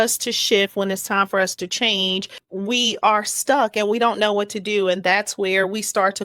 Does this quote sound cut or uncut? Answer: cut